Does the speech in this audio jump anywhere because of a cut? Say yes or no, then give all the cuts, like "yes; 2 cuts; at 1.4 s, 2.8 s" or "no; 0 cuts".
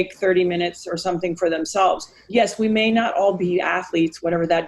yes; 1 cut; at 2.1 s